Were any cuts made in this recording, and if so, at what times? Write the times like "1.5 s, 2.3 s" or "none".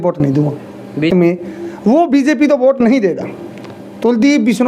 1.1 s